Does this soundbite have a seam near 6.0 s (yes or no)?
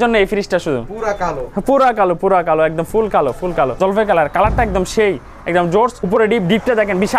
yes